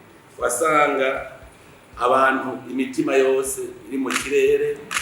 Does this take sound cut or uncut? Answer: uncut